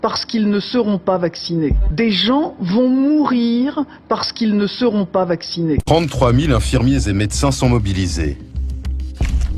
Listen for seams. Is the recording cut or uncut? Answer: cut